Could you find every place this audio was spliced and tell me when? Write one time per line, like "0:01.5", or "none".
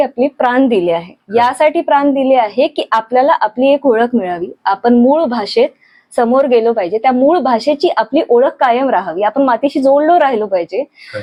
none